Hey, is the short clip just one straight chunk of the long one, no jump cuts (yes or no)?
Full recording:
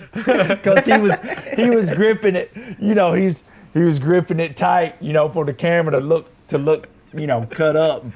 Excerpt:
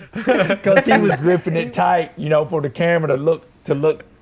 no